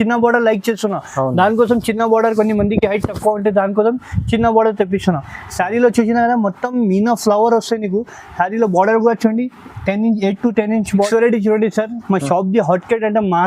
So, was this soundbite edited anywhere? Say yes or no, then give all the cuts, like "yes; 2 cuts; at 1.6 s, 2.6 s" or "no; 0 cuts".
yes; 1 cut; at 11.1 s